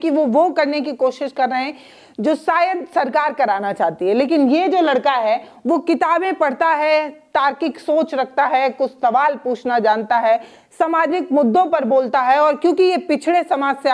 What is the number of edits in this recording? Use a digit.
0